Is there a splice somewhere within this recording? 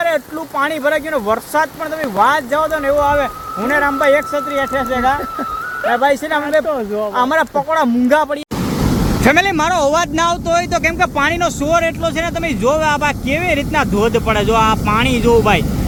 no; 0 cuts

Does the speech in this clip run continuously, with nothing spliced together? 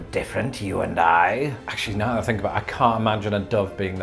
no; 1 cut; at 1.7 s

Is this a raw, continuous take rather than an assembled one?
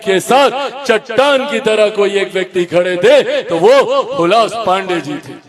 yes; 0 cuts

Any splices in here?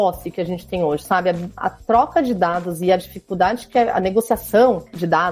yes; 1 cut; at 1.6 s

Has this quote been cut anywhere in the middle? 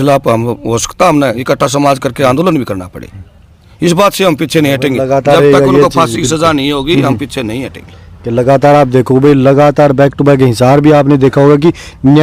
no; 0 cuts

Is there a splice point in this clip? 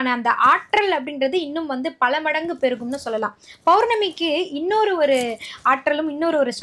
no; 0 cuts

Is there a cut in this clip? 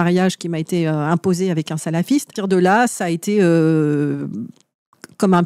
yes; 1 cut; at 2.3 s

